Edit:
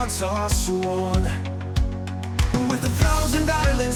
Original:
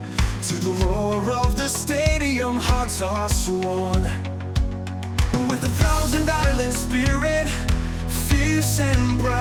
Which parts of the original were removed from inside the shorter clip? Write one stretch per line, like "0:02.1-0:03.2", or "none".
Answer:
none